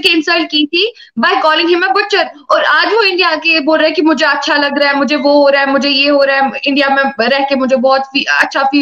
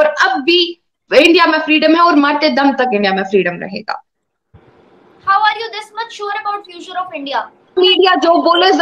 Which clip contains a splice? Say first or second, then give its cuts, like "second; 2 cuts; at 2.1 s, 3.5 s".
second; 1 cut; at 7.7 s